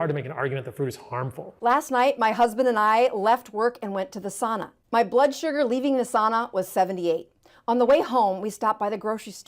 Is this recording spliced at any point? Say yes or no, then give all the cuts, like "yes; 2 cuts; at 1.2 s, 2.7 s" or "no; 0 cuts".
yes; 1 cut; at 1.4 s